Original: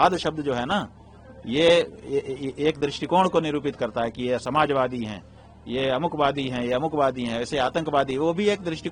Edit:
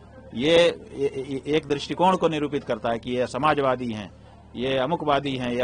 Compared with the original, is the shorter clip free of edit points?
yes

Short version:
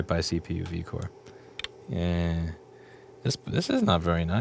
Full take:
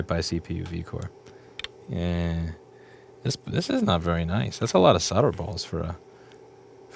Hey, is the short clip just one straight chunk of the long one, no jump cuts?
yes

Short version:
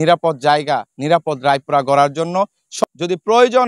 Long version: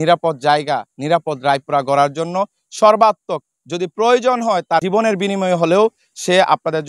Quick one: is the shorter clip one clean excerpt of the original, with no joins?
no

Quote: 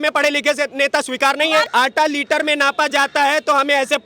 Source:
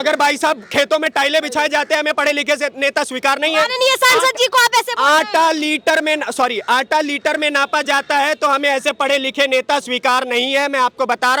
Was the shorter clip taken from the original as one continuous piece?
no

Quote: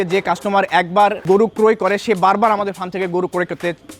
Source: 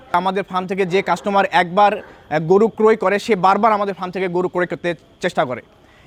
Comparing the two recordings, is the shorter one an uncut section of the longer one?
no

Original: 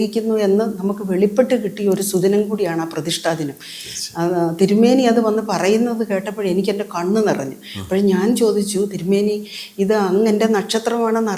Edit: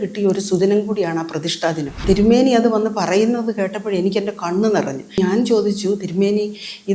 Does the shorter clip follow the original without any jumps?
no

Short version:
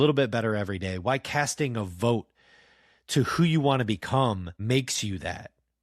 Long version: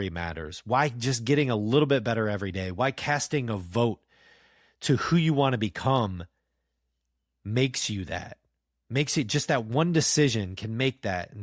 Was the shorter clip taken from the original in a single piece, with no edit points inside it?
no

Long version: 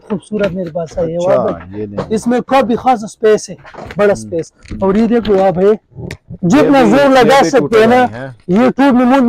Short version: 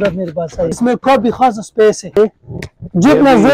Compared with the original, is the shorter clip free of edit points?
no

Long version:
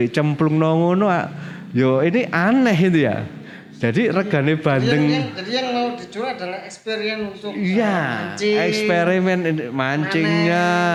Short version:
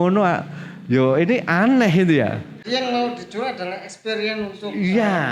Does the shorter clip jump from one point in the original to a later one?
yes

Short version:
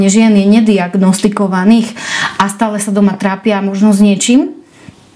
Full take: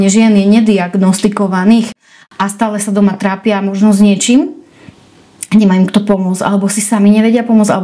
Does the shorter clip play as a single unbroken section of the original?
yes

